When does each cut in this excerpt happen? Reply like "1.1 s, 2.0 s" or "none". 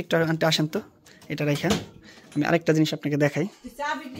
none